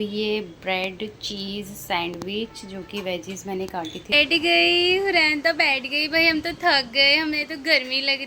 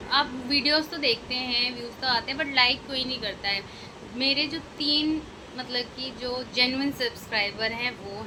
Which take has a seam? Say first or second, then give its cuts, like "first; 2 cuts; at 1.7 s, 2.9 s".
first; 1 cut; at 4.1 s